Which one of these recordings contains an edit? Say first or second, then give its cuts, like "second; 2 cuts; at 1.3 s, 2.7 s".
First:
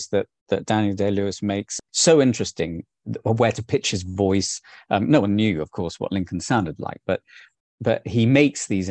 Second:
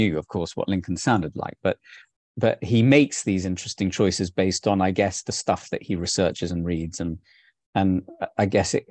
first; 1 cut; at 1.8 s